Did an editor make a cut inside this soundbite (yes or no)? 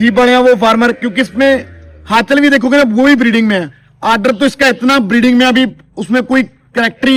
no